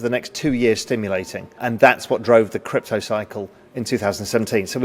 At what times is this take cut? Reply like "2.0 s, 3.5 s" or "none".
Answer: 1.6 s

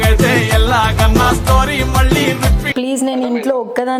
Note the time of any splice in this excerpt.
2.7 s

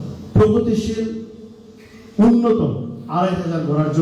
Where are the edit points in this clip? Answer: none

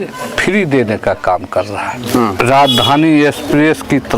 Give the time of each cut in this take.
2.4 s

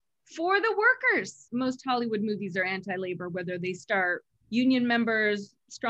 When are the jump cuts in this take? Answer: 1.4 s, 4.3 s

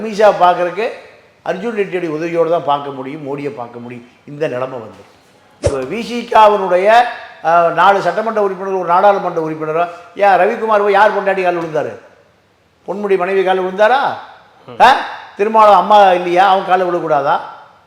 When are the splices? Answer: 5.7 s

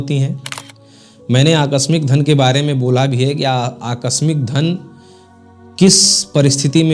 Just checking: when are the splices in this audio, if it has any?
none

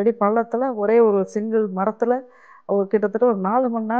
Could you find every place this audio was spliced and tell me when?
none

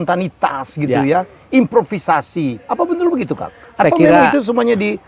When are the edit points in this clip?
none

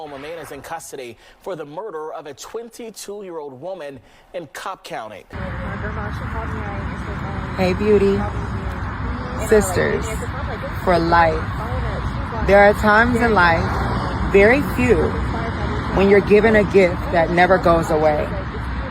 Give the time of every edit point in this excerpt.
5.2 s

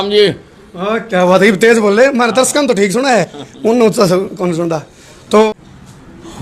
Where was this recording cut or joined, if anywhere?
5.5 s

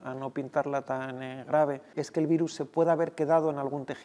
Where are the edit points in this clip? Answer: 2.0 s

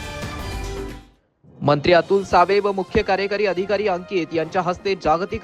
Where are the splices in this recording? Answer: 1.0 s

